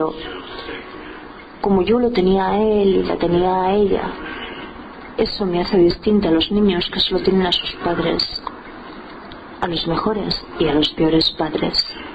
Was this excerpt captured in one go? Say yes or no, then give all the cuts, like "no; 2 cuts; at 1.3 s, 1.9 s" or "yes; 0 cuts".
no; 1 cut; at 10.8 s